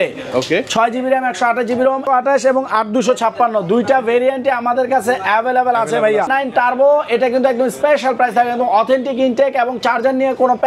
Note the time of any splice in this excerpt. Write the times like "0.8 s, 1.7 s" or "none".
2.0 s, 6.3 s